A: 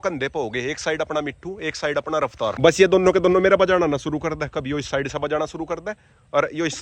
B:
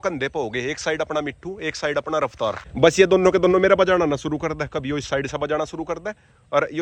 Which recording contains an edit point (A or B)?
A